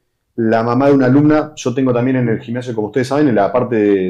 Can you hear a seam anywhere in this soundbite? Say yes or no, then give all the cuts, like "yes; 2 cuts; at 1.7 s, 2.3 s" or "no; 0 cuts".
no; 0 cuts